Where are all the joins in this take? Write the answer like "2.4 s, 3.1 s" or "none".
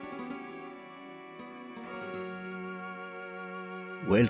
1.6 s